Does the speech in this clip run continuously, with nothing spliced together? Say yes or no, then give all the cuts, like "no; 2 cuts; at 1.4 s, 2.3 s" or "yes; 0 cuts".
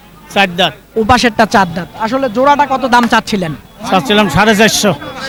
yes; 0 cuts